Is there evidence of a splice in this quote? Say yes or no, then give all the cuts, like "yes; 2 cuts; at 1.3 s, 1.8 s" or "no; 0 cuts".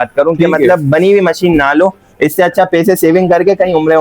no; 0 cuts